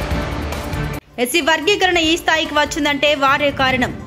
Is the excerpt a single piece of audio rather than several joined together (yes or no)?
no